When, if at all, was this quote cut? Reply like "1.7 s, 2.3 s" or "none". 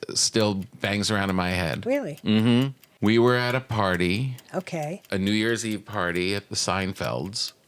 2.8 s